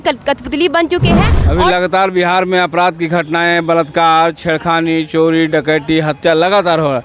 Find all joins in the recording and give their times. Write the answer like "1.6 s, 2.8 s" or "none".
1.3 s